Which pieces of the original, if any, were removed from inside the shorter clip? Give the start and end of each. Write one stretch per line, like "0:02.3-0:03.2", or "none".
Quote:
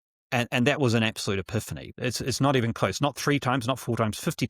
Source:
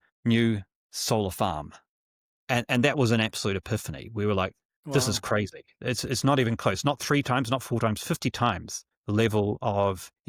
0:04.0-0:05.6